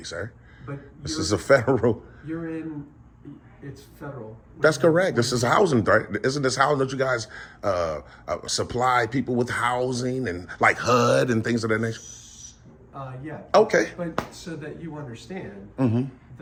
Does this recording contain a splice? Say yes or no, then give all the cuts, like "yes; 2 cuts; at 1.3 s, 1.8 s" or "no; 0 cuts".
no; 0 cuts